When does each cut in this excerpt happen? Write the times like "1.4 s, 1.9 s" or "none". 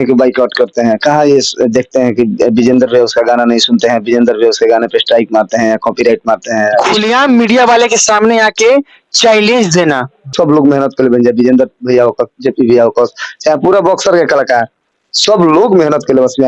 6.8 s, 10.3 s